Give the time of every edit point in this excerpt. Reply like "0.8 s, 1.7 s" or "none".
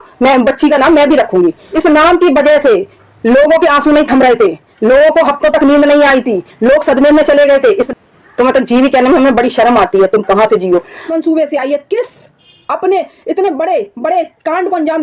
1.7 s, 7.8 s, 11.1 s

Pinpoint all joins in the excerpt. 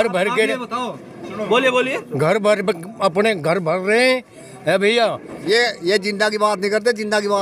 5.3 s

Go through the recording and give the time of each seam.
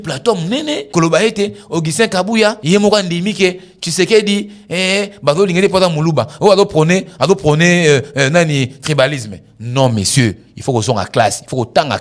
0.8 s, 2.6 s

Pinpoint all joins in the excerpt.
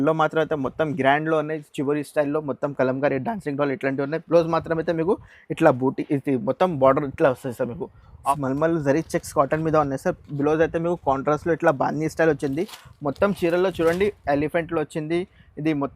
8.4 s

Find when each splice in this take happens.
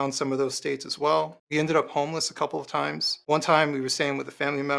1.4 s, 3.1 s

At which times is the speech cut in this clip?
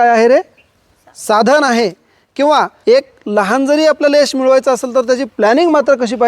2.7 s

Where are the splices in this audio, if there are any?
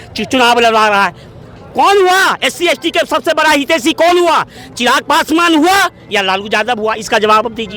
none

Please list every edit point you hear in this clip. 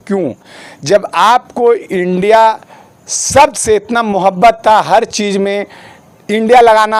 none

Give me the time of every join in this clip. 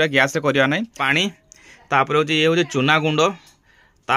1.0 s

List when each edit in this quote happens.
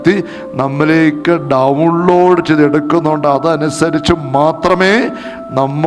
none

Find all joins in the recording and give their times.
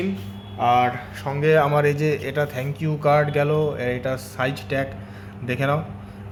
none

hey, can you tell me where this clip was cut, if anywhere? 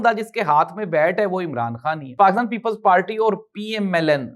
2.1 s

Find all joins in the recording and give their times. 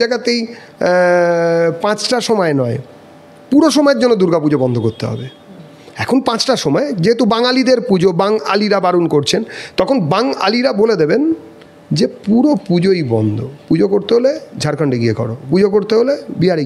none

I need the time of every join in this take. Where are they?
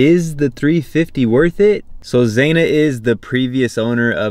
1.9 s

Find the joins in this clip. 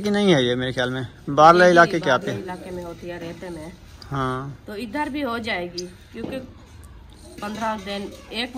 none

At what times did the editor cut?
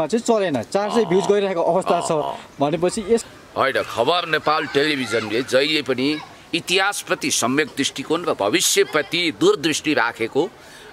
3.2 s

